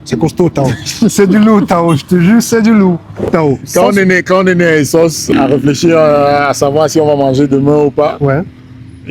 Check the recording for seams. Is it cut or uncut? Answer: cut